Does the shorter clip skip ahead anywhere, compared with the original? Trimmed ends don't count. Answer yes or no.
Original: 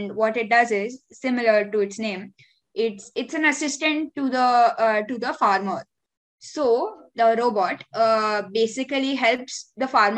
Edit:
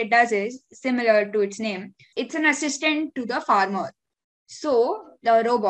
yes